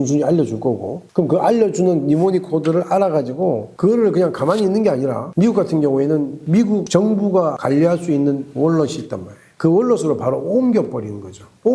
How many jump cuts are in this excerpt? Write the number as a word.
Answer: zero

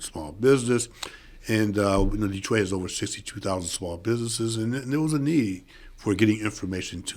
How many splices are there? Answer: zero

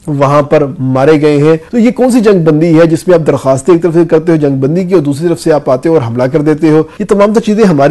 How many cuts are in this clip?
two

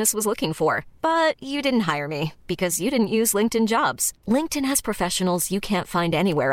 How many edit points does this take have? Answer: zero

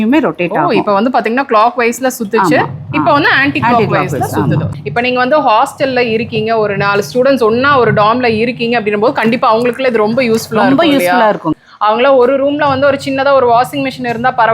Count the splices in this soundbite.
two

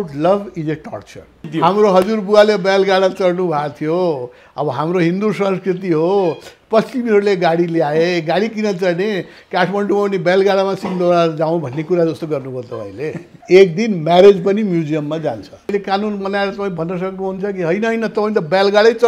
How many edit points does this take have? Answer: three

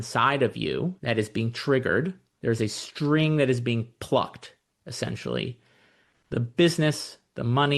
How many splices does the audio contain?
two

